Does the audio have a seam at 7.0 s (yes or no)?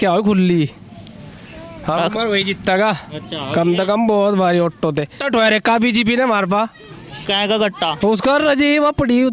no